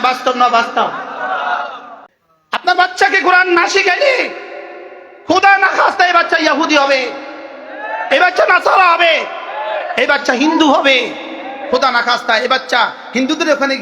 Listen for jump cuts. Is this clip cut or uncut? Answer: cut